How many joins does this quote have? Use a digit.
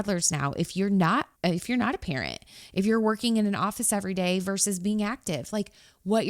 1